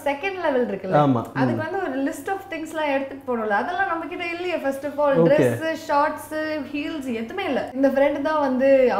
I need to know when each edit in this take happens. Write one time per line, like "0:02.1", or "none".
0:07.8